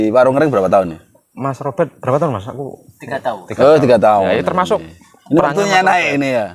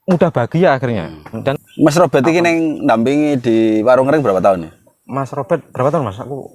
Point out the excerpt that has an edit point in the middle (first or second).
second